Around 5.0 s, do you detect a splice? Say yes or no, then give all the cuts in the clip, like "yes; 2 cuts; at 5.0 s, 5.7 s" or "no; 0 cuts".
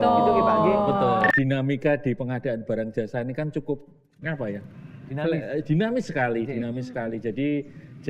no; 1 cut; at 1.3 s